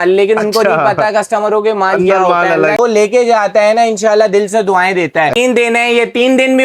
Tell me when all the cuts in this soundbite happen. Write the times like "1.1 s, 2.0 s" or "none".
2.8 s, 5.3 s